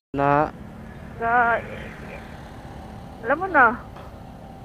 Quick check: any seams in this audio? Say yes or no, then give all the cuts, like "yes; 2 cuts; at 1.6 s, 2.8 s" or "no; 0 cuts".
no; 0 cuts